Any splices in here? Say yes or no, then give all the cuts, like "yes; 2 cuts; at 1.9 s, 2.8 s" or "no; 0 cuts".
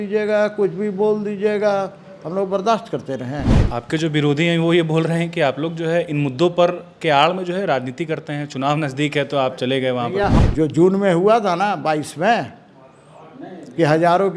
yes; 2 cuts; at 3.6 s, 10.4 s